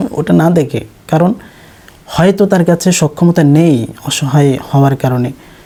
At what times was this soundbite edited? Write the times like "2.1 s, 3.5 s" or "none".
none